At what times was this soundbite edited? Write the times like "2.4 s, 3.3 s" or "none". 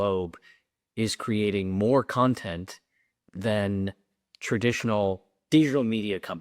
none

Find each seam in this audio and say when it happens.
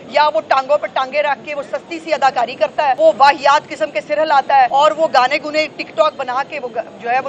3.0 s, 4.7 s

